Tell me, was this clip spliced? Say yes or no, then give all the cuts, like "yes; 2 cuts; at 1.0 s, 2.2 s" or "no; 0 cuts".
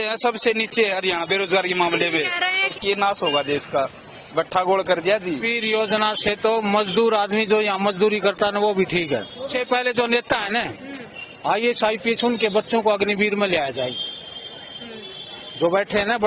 yes; 3 cuts; at 2.7 s, 5.5 s, 9.5 s